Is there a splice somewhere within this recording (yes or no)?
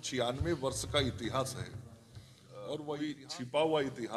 yes